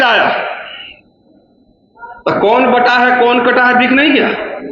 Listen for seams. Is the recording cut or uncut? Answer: uncut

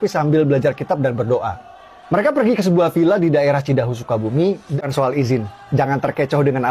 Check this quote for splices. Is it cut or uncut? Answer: cut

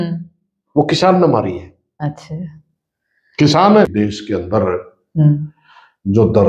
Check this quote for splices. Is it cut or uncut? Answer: cut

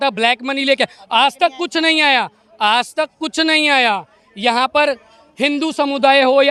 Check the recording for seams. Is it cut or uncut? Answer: uncut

